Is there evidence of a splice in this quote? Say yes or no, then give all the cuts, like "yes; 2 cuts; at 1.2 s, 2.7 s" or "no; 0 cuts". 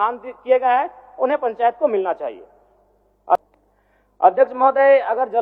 yes; 1 cut; at 3.4 s